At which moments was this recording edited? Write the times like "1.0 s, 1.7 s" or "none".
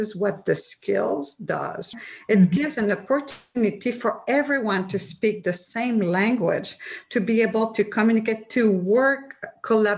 1.9 s